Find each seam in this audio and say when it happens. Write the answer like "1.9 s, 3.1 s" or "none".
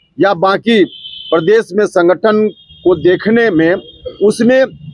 none